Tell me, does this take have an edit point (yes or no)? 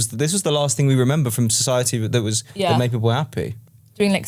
no